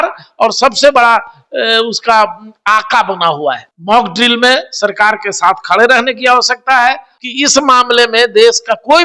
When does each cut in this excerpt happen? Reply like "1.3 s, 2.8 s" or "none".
3.7 s, 7.1 s